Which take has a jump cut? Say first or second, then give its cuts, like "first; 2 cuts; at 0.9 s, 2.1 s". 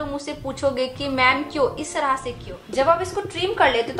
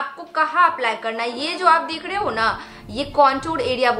first; 1 cut; at 3.0 s